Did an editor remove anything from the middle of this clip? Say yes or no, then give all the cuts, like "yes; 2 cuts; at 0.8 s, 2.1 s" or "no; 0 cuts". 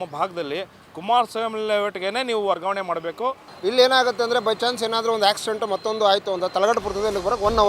yes; 1 cut; at 3.5 s